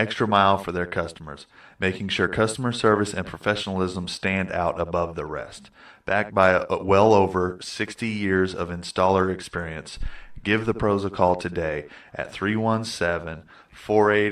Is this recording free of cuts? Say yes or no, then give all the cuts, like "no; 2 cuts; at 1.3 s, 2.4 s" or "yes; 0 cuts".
yes; 0 cuts